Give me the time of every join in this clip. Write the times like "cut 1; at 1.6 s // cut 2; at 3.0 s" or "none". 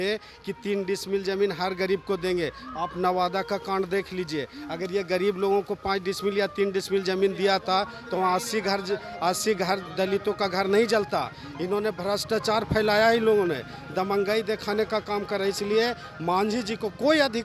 none

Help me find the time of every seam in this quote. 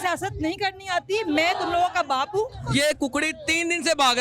cut 1; at 2.6 s

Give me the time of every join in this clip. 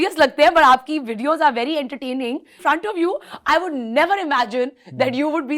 cut 1; at 2.5 s

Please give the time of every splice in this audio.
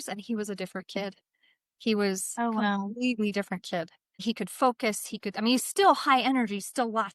cut 1; at 4.1 s

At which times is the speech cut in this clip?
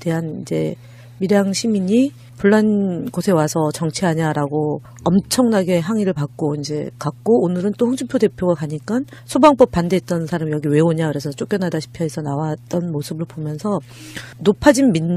cut 1; at 6.5 s

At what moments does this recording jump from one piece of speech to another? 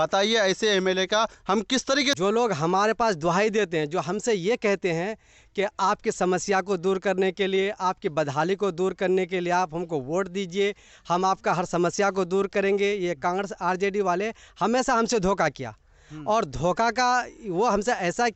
cut 1; at 2.2 s

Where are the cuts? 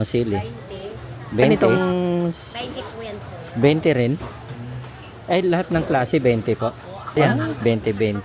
cut 1; at 1.5 s // cut 2; at 7.2 s

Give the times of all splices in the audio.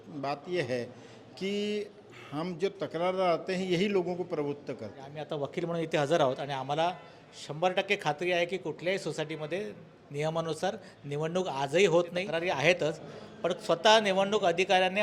cut 1; at 5.2 s // cut 2; at 12.2 s

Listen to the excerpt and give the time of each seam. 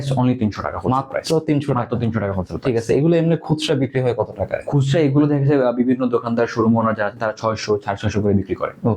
none

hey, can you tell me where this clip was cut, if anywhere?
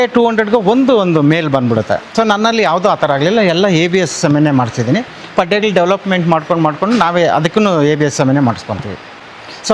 none

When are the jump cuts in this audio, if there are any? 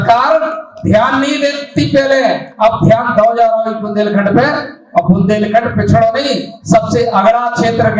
none

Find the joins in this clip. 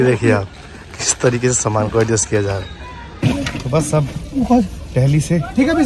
cut 1; at 3.2 s

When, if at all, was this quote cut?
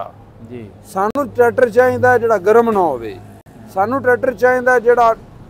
none

